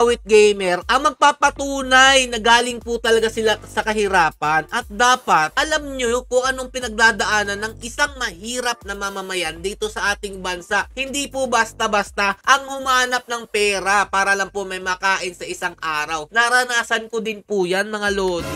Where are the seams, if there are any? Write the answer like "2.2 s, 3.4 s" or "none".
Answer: none

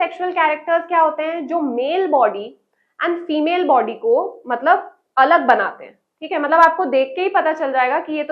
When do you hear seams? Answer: none

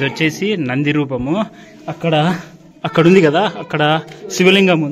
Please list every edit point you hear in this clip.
none

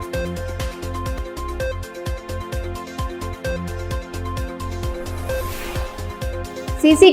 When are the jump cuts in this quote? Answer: 1.1 s

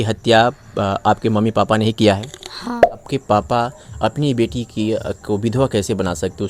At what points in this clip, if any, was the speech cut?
3.0 s

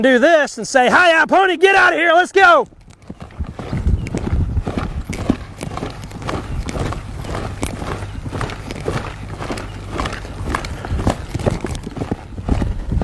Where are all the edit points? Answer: none

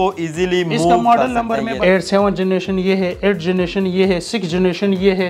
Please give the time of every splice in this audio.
1.7 s

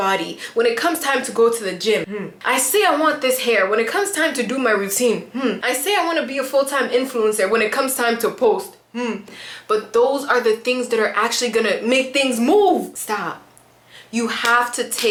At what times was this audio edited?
none

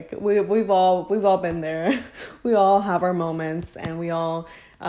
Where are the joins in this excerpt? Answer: none

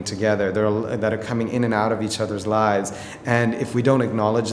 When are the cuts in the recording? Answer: none

